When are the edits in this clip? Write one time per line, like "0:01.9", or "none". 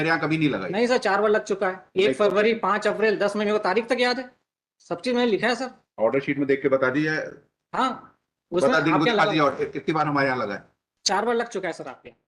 none